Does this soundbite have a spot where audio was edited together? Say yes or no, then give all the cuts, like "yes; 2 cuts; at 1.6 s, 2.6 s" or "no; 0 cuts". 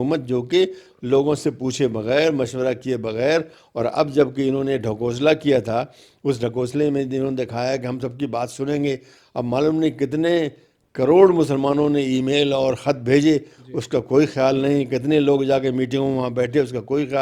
no; 0 cuts